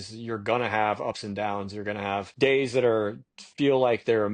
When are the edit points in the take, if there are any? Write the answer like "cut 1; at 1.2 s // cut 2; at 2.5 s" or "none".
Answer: cut 1; at 2.3 s